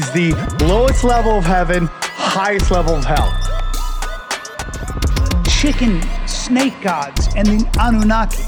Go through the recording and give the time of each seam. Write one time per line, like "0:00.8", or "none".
none